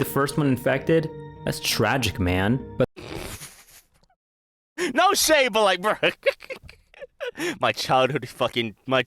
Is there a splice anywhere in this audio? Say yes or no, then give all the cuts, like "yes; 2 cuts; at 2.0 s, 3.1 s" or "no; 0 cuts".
yes; 1 cut; at 2.5 s